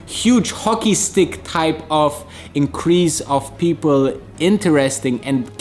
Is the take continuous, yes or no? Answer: yes